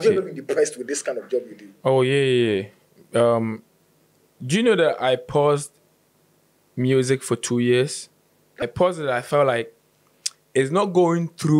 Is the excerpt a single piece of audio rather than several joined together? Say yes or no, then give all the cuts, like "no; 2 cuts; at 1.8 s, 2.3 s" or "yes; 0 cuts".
no; 1 cut; at 8.6 s